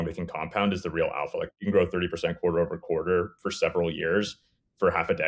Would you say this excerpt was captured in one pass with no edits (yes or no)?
yes